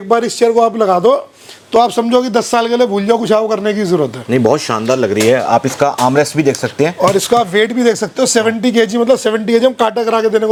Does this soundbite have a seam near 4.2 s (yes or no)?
no